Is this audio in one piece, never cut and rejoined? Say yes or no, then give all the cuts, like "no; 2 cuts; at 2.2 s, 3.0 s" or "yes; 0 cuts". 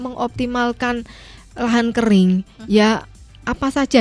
yes; 0 cuts